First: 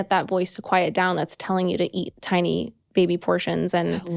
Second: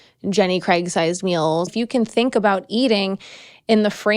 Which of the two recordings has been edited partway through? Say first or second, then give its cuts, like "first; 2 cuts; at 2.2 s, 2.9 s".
second; 1 cut; at 1.7 s